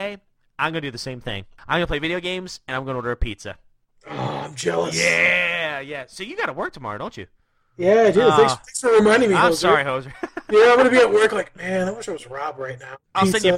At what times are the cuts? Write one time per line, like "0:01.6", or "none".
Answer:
0:01.5